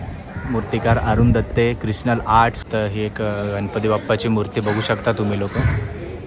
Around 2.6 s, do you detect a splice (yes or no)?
yes